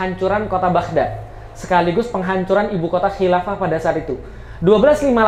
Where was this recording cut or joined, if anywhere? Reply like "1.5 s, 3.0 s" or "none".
none